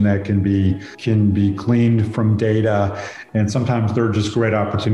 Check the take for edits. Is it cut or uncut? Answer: cut